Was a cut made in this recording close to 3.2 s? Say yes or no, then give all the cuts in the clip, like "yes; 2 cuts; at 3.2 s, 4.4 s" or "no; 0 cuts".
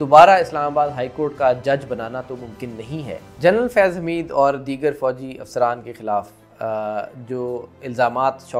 yes; 1 cut; at 3.2 s